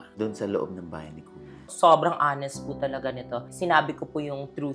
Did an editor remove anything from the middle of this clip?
yes; 2 cuts; at 1.6 s, 3.5 s

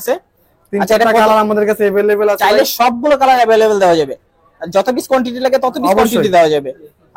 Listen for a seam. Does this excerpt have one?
no; 0 cuts

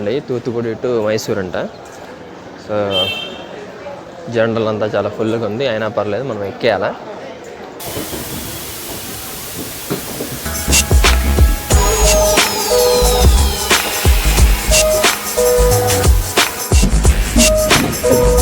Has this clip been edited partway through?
no; 0 cuts

